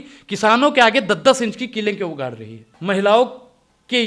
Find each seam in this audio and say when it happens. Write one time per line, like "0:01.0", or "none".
0:02.7